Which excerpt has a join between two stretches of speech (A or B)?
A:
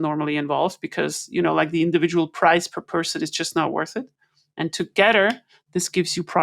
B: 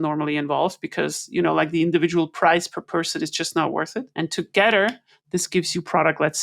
B